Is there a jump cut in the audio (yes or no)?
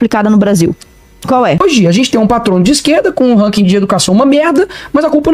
yes